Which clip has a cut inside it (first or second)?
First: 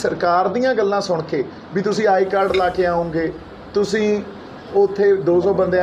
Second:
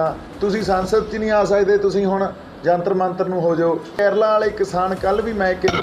second